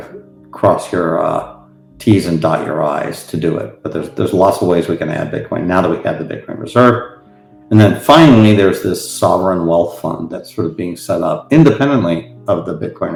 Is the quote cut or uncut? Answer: uncut